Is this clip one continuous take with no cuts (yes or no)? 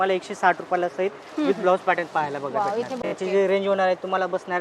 no